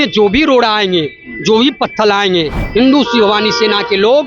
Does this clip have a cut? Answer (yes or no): no